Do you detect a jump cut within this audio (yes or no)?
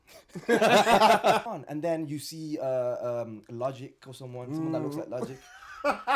yes